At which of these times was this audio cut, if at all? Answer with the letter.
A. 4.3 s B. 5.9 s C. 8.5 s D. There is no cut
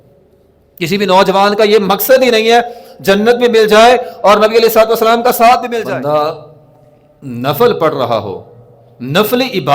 B